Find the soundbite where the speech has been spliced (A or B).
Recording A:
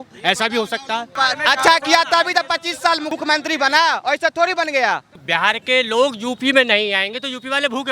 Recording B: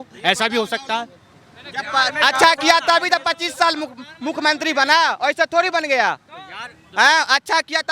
A